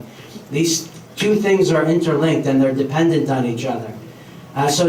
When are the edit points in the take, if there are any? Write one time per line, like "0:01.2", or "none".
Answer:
none